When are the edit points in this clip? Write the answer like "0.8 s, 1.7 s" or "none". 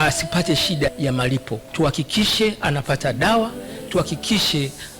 1.6 s